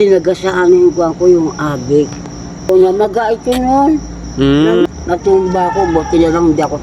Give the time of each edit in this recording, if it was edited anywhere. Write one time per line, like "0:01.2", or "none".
0:02.7
0:04.9